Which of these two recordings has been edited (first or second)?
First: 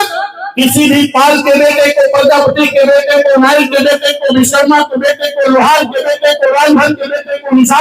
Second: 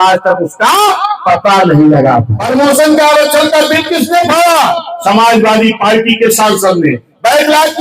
second